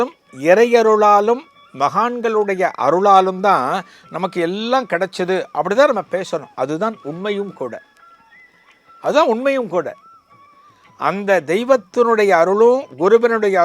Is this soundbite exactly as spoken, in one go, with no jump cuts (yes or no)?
yes